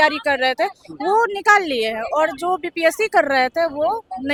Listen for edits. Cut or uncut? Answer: uncut